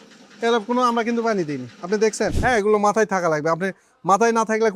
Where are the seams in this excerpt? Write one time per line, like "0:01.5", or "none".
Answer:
0:02.4